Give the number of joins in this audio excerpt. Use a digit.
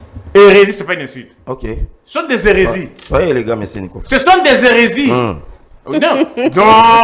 0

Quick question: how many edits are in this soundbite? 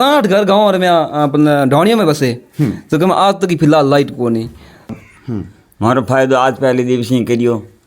1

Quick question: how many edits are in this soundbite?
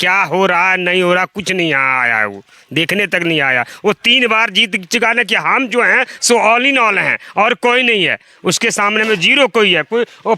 0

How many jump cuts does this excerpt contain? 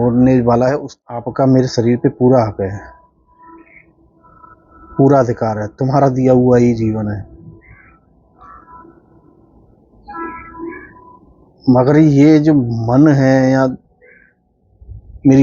1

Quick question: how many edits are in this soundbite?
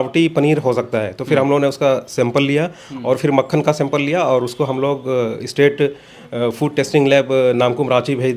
0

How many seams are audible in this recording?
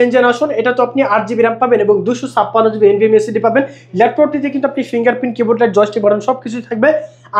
0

